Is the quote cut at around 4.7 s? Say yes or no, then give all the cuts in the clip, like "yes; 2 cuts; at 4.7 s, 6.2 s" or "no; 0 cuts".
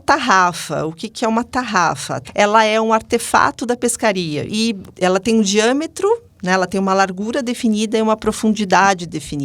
yes; 2 cuts; at 2.2 s, 4.7 s